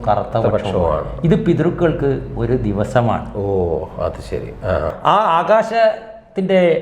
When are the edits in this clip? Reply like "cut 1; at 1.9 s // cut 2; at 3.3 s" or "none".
cut 1; at 4.9 s